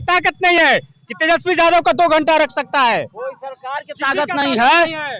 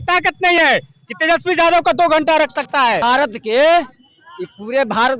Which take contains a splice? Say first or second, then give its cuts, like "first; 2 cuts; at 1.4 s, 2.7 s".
second; 1 cut; at 3.0 s